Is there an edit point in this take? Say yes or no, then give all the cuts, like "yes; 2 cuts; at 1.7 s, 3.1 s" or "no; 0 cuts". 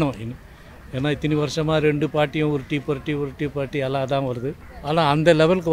yes; 1 cut; at 4.7 s